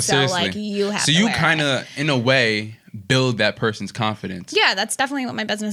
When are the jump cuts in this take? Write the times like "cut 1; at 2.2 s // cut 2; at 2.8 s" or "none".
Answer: none